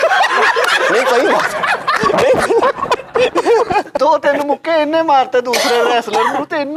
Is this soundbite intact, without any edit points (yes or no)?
no